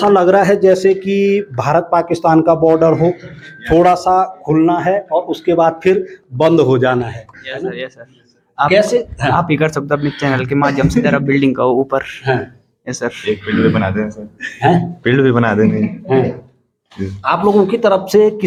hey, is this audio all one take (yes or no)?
yes